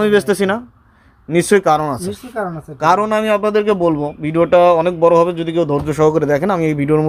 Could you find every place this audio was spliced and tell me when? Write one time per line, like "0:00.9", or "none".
none